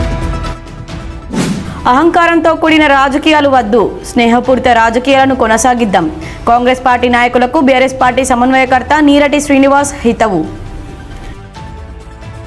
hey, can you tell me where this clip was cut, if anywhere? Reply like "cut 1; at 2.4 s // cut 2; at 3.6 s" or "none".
cut 1; at 1.6 s